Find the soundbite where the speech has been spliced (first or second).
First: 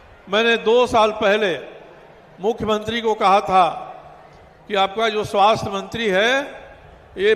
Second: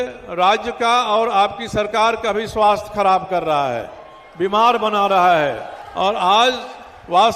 second